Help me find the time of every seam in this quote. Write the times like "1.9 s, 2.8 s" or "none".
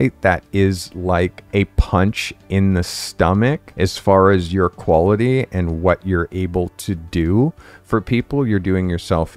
1.4 s, 3.7 s